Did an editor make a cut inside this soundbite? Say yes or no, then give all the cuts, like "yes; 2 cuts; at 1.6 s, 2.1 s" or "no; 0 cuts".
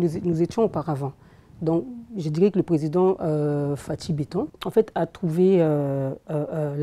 yes; 1 cut; at 4.6 s